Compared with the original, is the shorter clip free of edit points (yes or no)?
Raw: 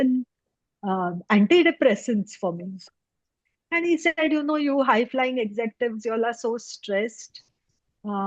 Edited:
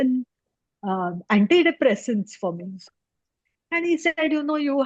yes